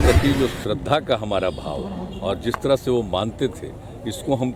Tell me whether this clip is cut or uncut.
uncut